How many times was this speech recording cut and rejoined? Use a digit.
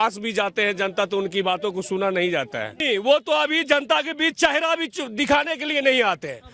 1